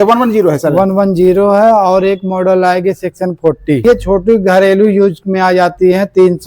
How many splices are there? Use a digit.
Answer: 1